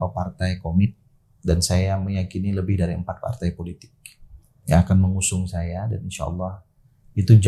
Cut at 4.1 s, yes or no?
no